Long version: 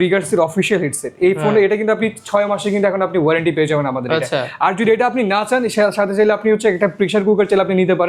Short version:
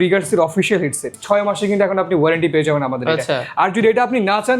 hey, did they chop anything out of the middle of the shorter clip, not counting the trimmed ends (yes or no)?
yes